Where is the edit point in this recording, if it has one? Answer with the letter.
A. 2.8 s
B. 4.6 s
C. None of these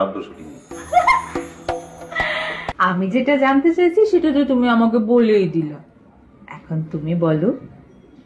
A